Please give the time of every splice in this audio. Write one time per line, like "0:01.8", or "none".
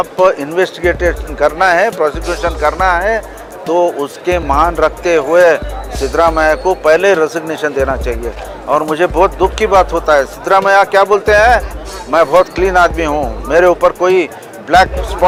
none